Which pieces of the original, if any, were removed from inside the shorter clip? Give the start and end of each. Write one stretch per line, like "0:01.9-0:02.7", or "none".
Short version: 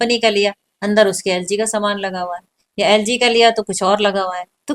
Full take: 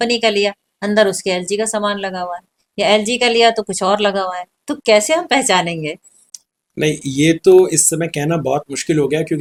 none